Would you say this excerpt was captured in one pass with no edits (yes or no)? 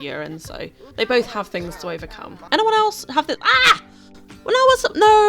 no